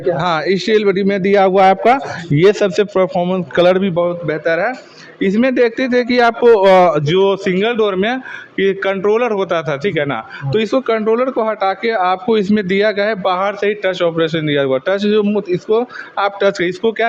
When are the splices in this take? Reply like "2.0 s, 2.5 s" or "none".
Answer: none